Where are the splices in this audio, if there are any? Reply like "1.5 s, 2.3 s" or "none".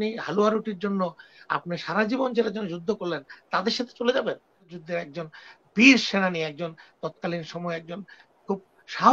4.7 s